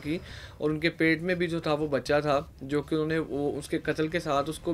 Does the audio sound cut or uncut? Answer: uncut